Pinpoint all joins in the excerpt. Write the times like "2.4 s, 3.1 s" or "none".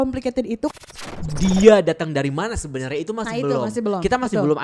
1.0 s